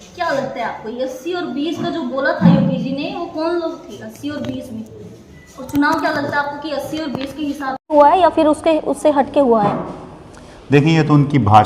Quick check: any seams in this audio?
no; 0 cuts

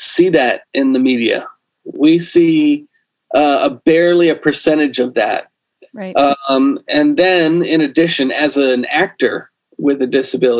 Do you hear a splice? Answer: no; 0 cuts

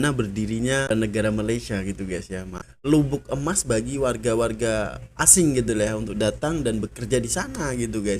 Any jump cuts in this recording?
yes; 2 cuts; at 0.9 s, 2.6 s

